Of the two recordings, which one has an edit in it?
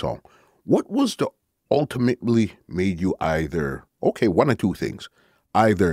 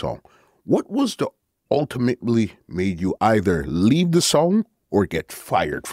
second; 1 cut; at 3.1 s

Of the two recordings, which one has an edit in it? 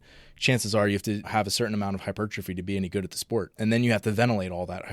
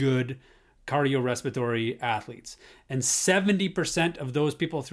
first; 2 cuts; at 1.3 s, 3.5 s

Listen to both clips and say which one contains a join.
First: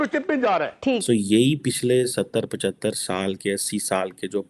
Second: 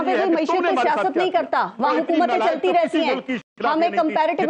first; 1 cut; at 1.0 s

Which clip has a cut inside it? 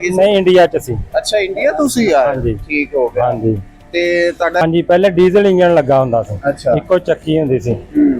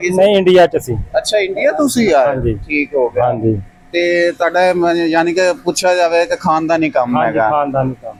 first; 1 cut; at 4.6 s

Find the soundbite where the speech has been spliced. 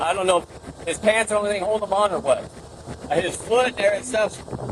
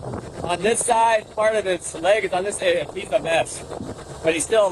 first; 1 cut; at 2.5 s

